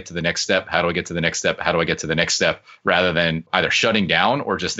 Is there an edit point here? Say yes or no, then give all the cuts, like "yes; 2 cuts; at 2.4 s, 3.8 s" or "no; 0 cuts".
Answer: no; 0 cuts